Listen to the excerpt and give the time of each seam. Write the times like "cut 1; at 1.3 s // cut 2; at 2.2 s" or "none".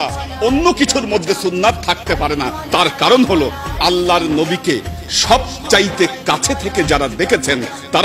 none